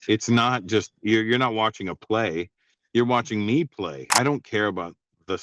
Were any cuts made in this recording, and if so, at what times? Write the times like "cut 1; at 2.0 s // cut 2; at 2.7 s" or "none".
cut 1; at 4.1 s

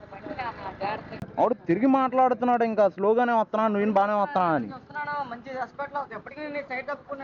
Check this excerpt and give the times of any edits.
cut 1; at 1.1 s

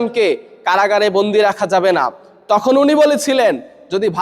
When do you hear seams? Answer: cut 1; at 2.4 s

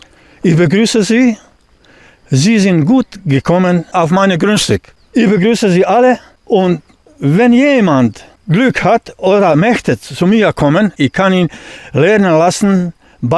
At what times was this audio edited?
cut 1; at 3.9 s // cut 2; at 4.9 s // cut 3; at 6.3 s // cut 4; at 8.3 s // cut 5; at 10.9 s

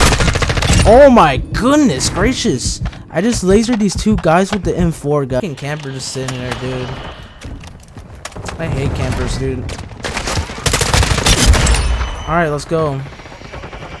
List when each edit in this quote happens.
cut 1; at 5.4 s

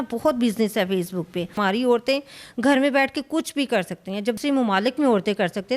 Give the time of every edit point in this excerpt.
cut 1; at 1.6 s // cut 2; at 4.4 s

